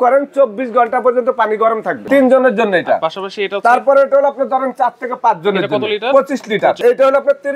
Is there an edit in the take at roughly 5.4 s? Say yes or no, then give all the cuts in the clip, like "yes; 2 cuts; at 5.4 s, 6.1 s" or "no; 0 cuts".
no; 2 cuts; at 2.0 s, 6.8 s